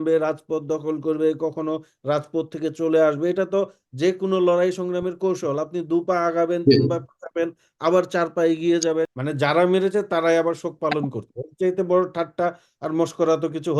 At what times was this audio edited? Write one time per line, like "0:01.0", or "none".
0:09.1